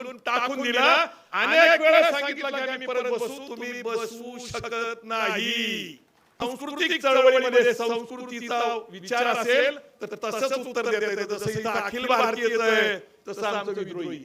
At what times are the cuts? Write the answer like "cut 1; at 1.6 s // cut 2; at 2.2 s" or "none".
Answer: cut 1; at 6.4 s

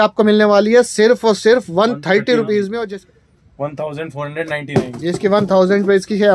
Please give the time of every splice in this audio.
cut 1; at 2.9 s

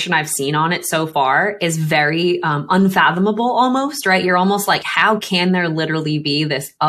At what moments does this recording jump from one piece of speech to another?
none

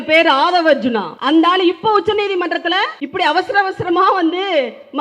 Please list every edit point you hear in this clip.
cut 1; at 1.1 s // cut 2; at 3.0 s

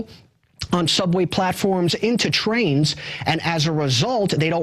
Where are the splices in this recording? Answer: none

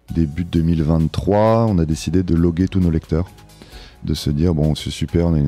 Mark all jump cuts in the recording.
cut 1; at 2.3 s

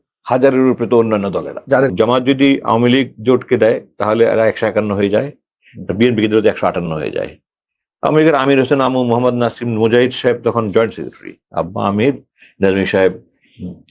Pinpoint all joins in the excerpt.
cut 1; at 1.9 s

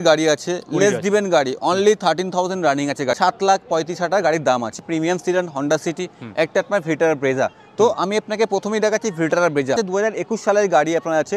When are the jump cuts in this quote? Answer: cut 1; at 3.1 s // cut 2; at 4.8 s // cut 3; at 9.8 s

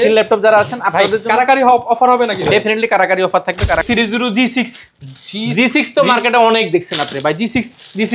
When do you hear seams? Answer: cut 1; at 3.8 s

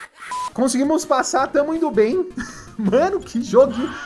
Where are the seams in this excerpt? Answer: none

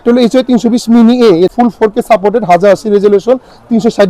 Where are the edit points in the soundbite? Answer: cut 1; at 1.5 s

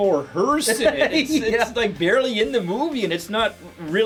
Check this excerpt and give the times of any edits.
none

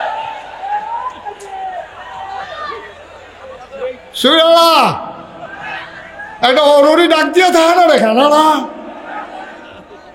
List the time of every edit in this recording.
none

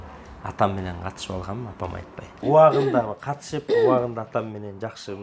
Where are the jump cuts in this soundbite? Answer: cut 1; at 2.4 s

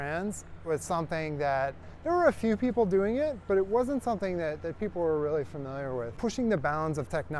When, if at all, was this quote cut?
cut 1; at 6.1 s

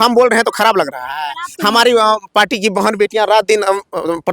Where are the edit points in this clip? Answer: cut 1; at 1.7 s

